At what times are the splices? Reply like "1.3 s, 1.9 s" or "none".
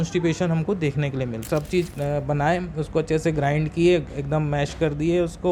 1.4 s